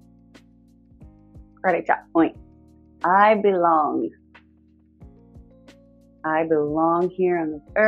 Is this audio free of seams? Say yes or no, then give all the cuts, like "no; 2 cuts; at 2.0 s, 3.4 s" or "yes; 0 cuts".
no; 3 cuts; at 1.6 s, 4.2 s, 5.6 s